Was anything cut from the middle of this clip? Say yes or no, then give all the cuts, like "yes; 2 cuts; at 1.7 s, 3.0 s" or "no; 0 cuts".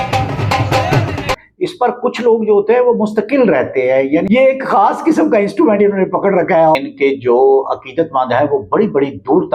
yes; 3 cuts; at 1.4 s, 4.2 s, 6.8 s